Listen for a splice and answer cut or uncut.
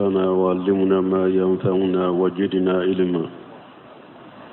uncut